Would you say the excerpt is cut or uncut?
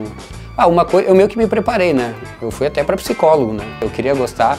cut